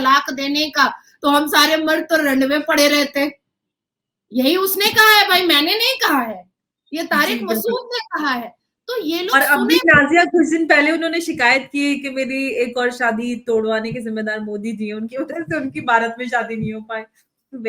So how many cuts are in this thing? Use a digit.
0